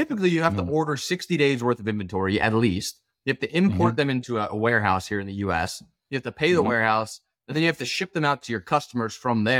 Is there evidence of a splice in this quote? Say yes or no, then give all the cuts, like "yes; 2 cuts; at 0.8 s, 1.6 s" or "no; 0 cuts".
no; 0 cuts